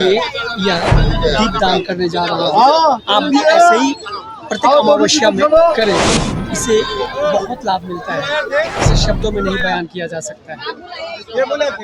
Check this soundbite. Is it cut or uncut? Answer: uncut